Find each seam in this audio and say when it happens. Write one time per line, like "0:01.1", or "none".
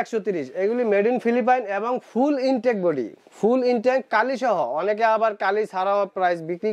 none